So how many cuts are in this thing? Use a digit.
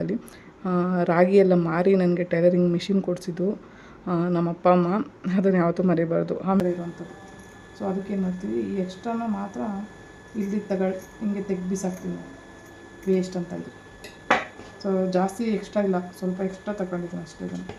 1